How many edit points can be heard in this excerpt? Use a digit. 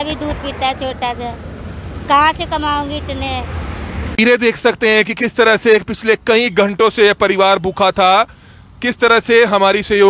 1